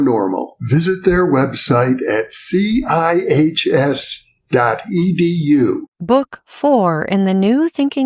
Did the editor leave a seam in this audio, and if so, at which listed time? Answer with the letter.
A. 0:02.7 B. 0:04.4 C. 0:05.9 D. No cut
C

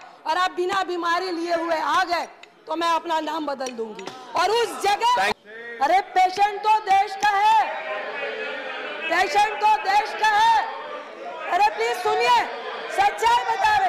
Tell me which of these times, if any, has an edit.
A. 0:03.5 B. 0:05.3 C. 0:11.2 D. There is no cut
B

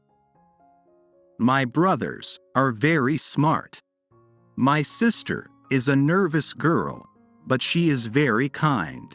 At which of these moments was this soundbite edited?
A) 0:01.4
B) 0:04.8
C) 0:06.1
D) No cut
A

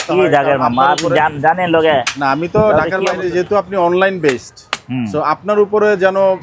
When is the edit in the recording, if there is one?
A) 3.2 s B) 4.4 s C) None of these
A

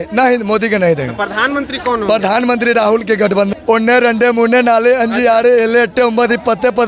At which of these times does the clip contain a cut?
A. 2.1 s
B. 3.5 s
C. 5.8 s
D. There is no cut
B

